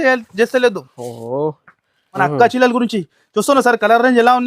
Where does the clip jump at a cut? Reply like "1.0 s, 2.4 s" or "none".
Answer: 2.0 s

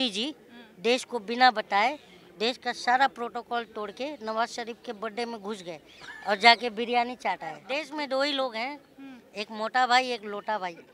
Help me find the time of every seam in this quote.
7.7 s

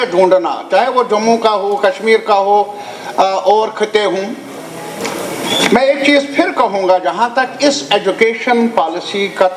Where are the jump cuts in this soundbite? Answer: none

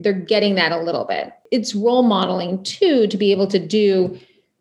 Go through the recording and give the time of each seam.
1.4 s

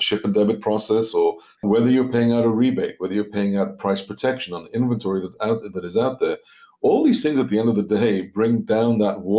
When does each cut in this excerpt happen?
1.5 s

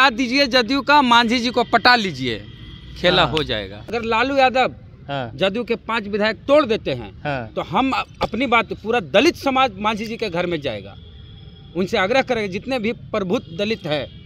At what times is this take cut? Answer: 3.8 s

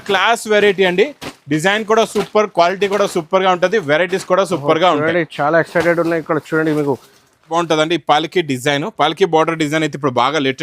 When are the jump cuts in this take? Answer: 7.5 s

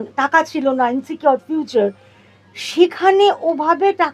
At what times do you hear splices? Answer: none

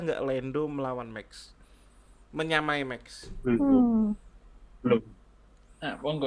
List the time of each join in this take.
none

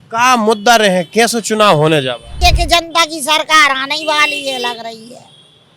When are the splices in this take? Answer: 2.3 s

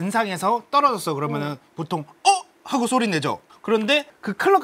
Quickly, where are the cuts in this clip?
none

